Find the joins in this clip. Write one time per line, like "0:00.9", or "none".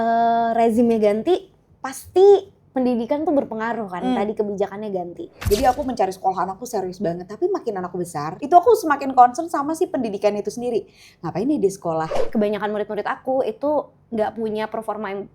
0:05.4
0:08.4
0:12.2